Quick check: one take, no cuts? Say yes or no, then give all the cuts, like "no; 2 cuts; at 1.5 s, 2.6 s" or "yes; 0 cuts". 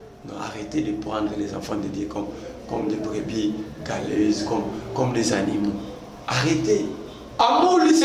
no; 1 cut; at 7.2 s